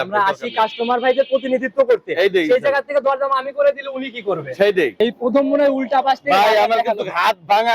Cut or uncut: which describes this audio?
cut